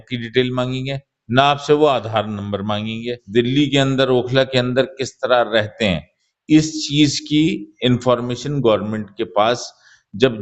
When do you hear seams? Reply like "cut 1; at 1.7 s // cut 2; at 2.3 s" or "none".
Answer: cut 1; at 3.2 s